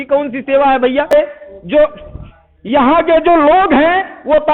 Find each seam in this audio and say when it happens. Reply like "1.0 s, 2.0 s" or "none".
1.1 s